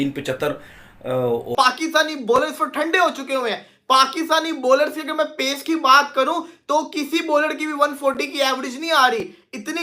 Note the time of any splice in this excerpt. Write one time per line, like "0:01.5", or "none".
0:01.5